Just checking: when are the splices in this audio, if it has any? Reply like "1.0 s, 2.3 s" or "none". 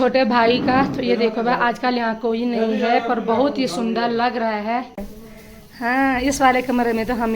5.1 s